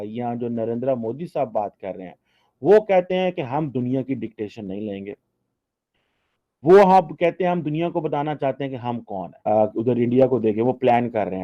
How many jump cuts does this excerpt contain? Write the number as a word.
one